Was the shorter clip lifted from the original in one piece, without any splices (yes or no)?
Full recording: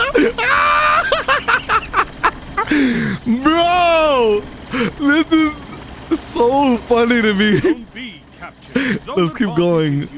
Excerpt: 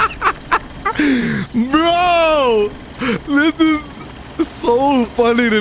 yes